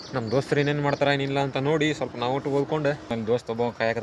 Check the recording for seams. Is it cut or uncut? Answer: cut